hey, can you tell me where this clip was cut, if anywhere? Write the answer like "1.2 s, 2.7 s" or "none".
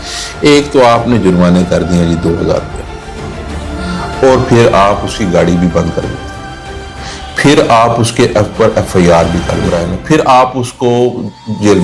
9.7 s